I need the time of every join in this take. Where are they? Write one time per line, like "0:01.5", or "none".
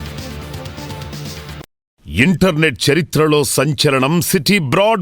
0:02.0